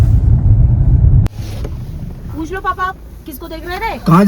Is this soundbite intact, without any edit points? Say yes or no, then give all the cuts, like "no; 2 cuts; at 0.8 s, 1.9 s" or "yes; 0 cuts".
no; 1 cut; at 1.3 s